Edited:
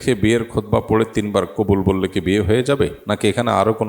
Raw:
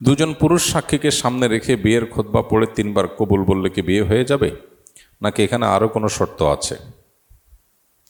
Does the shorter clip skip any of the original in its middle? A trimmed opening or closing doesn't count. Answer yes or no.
yes